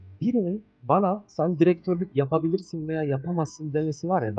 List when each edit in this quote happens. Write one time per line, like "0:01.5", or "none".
none

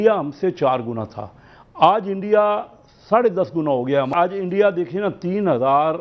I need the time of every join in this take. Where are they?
0:04.1

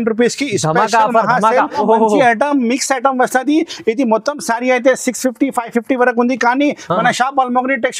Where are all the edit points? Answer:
0:01.8

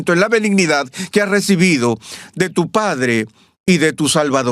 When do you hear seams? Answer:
0:03.4

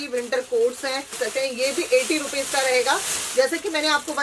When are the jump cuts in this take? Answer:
0:01.1

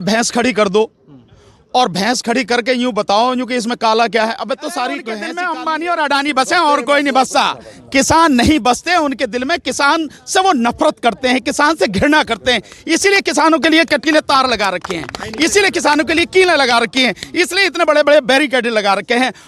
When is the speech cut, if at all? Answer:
0:05.3

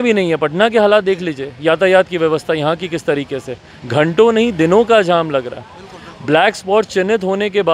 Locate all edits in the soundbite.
none

